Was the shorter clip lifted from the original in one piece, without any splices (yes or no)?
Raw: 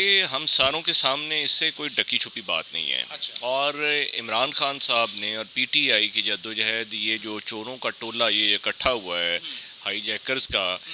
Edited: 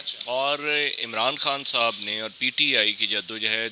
yes